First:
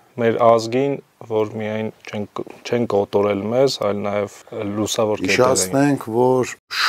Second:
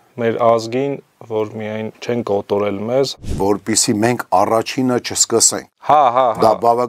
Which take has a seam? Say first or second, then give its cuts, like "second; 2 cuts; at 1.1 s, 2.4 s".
second; 2 cuts; at 1.9 s, 3.3 s